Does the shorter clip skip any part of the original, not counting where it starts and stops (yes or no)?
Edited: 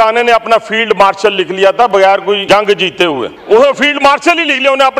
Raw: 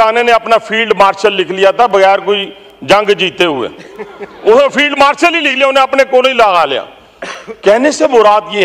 yes